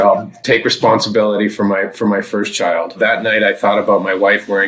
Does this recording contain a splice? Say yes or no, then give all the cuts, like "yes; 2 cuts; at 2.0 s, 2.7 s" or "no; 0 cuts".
yes; 1 cut; at 3.0 s